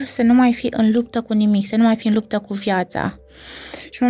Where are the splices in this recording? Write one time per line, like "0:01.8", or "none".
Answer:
none